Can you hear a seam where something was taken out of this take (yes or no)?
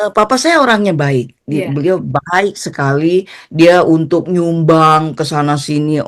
yes